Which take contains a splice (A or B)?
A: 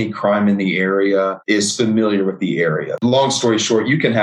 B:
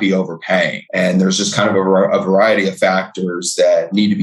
A